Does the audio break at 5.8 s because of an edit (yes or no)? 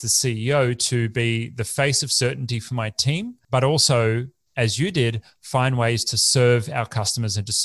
no